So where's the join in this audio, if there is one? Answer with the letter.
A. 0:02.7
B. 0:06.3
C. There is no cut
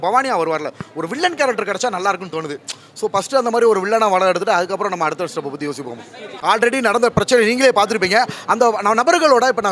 B